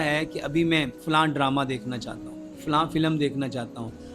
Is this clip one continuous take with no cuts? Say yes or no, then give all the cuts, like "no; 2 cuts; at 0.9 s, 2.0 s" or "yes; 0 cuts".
no; 1 cut; at 1.0 s